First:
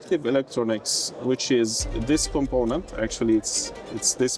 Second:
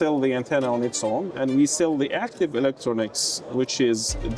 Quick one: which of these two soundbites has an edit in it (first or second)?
second